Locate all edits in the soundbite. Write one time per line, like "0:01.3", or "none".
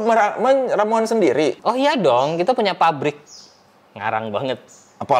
0:01.6